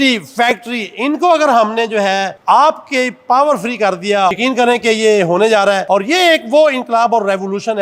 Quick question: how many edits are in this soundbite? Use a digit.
2